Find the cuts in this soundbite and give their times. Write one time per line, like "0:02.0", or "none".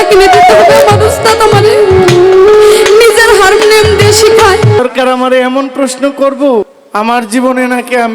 0:04.8
0:06.8